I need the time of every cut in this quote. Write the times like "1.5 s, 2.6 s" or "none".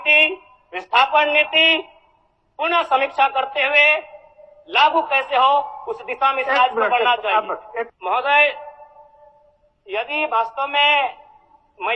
7.9 s